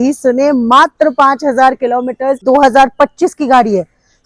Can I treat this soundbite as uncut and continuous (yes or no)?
no